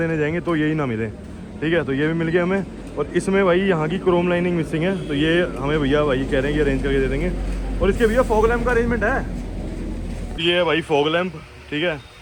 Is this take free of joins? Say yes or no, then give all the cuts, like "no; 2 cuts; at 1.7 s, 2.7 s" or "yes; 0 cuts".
yes; 0 cuts